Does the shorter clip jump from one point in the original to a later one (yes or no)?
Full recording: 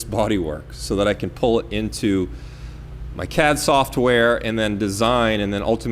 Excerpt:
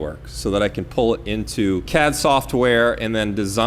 yes